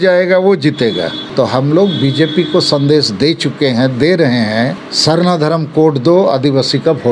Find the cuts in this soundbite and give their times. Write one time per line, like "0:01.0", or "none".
0:01.2
0:04.9